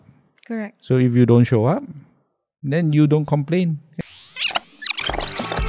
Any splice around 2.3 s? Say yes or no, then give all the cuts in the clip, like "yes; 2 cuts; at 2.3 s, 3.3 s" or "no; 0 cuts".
no; 1 cut; at 3.9 s